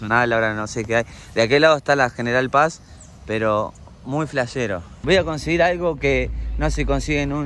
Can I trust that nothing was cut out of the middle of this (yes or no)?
no